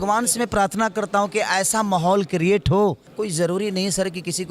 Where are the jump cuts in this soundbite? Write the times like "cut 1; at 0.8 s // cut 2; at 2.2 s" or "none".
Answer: cut 1; at 3.1 s